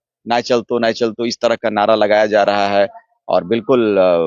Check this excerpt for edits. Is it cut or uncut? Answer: uncut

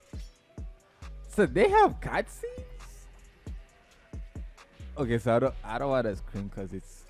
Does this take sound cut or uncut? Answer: cut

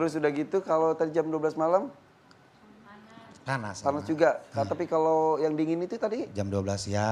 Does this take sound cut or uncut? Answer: uncut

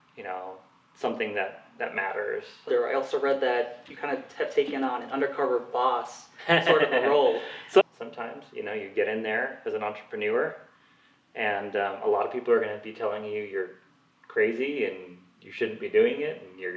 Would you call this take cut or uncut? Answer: cut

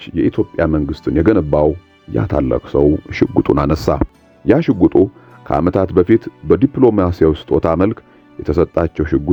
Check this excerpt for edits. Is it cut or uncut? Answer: uncut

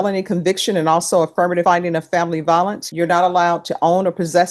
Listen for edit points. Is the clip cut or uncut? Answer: cut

